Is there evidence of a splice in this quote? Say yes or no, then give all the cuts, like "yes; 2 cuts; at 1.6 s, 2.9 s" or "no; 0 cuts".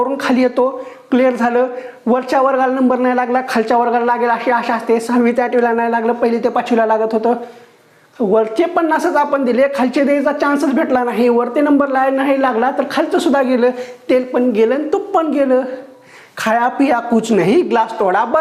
no; 0 cuts